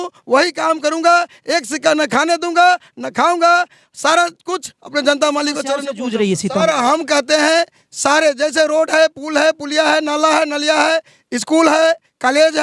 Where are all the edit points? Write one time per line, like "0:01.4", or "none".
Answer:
0:05.9